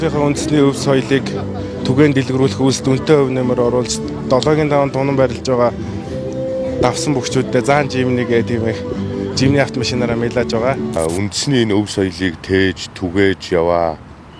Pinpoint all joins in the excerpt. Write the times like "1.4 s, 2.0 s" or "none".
11.0 s